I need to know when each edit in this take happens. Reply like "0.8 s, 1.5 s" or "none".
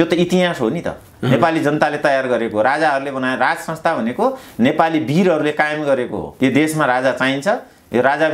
none